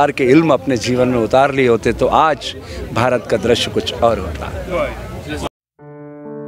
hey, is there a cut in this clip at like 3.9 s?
no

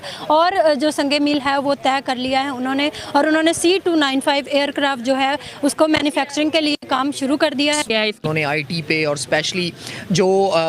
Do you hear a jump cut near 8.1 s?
yes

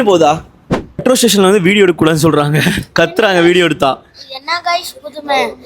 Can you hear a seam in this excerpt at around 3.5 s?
no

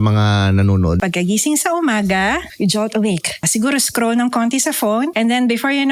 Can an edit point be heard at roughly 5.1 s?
yes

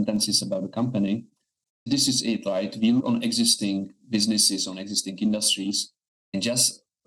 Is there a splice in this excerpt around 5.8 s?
no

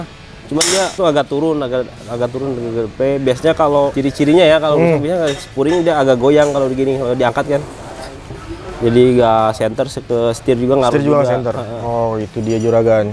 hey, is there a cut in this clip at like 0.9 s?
yes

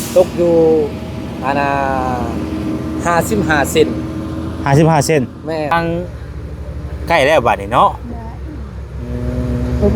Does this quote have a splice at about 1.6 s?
no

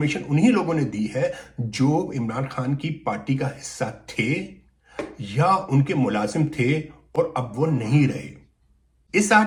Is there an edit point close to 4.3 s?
no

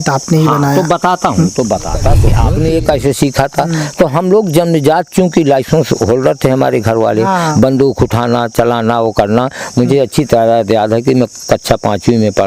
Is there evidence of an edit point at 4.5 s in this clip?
no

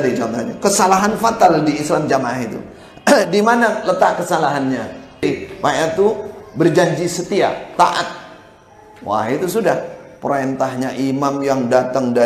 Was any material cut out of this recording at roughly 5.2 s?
yes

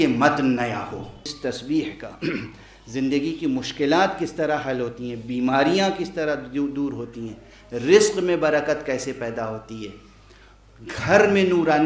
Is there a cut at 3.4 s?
no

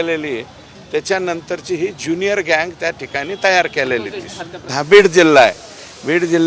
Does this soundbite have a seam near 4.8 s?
yes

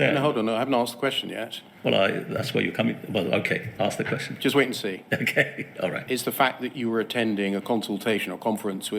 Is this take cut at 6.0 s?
yes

